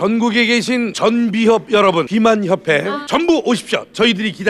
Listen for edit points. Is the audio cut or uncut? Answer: cut